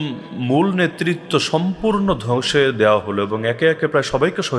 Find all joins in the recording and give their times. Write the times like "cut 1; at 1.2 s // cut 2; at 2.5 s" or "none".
none